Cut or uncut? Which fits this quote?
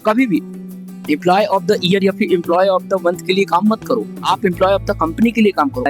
uncut